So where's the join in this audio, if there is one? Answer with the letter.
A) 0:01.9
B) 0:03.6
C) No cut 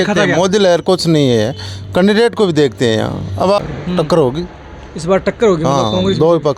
B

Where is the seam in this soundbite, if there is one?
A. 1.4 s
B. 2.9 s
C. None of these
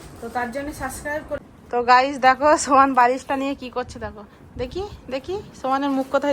A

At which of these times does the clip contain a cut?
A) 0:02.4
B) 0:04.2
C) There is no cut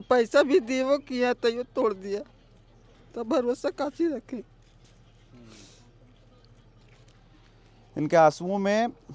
C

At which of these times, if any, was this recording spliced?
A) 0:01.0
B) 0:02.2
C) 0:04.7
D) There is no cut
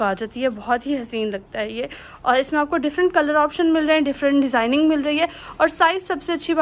D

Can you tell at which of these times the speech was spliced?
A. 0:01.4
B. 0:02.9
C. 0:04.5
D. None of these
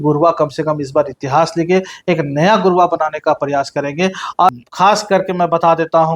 C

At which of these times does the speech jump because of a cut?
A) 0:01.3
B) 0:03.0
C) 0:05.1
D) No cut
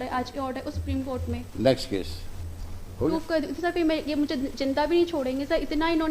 B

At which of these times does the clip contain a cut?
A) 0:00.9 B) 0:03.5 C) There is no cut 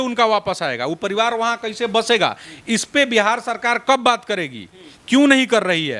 C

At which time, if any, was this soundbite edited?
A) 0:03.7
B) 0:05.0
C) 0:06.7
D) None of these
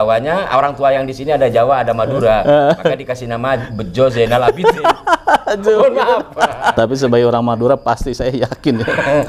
C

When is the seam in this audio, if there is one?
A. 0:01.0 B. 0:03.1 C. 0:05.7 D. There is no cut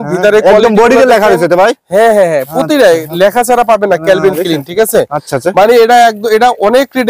D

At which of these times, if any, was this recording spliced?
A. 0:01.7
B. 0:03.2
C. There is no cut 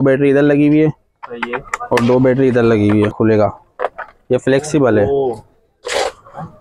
B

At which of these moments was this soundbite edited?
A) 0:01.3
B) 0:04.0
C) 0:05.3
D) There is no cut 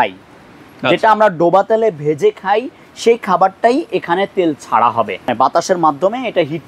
C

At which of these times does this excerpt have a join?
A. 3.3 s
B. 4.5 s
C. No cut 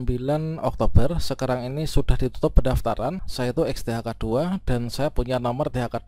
A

